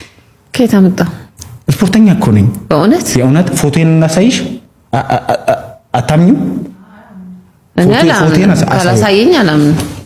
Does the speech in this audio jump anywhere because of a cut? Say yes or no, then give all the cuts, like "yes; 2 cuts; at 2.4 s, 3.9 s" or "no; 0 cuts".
no; 0 cuts